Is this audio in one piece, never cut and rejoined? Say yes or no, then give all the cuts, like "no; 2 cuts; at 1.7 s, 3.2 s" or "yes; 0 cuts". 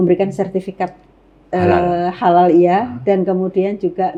yes; 0 cuts